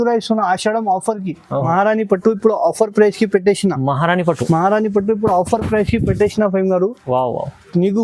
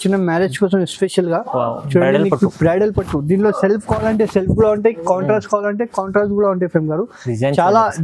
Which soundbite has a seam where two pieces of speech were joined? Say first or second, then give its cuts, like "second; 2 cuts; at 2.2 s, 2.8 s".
first; 1 cut; at 1.6 s